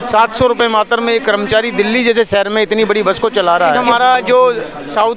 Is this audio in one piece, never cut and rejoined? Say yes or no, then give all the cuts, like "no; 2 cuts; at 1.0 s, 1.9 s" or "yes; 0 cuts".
no; 1 cut; at 3.8 s